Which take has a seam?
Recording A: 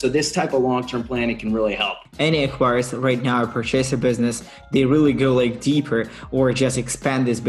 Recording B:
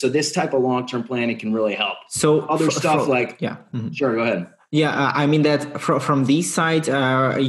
A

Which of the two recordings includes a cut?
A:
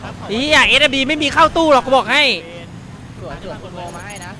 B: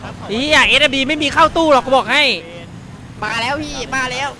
B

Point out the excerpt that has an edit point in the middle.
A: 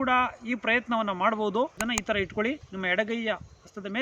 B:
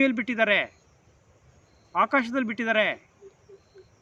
A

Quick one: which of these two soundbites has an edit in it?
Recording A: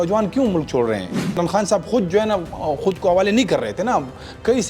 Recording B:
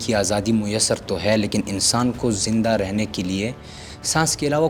A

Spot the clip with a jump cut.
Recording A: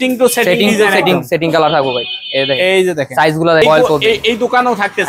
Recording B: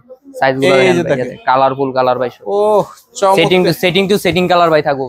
A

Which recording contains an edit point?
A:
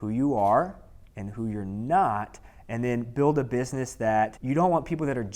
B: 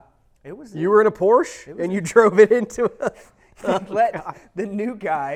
A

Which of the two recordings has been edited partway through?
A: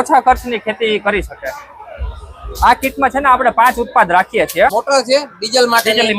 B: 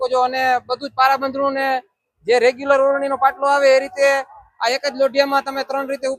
A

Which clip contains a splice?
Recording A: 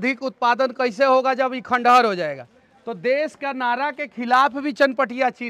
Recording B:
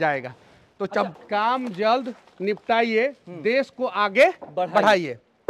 B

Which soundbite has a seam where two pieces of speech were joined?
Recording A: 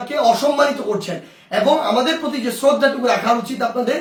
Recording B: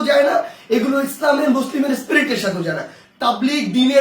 B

